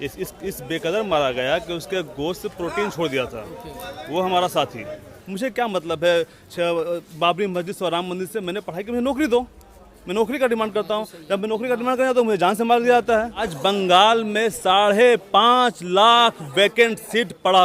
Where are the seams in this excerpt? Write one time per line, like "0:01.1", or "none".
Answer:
0:05.2
0:13.5